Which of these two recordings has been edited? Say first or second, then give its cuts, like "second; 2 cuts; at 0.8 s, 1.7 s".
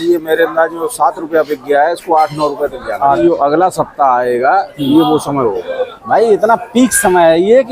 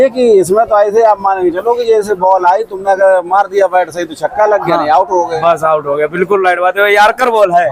first; 2 cuts; at 3.2 s, 5.9 s